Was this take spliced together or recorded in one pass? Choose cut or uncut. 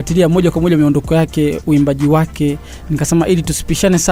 uncut